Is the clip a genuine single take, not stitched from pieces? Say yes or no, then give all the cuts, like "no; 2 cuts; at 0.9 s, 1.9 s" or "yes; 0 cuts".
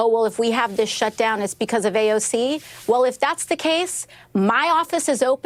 yes; 0 cuts